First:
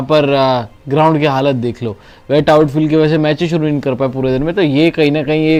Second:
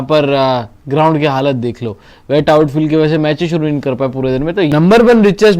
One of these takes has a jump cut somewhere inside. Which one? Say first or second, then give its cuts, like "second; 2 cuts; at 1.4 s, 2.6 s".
second; 1 cut; at 4.7 s